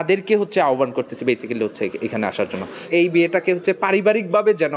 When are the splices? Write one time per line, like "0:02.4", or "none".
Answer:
0:02.7